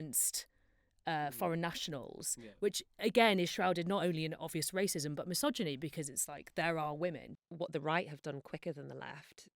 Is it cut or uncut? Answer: cut